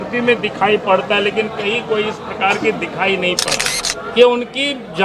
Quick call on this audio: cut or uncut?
cut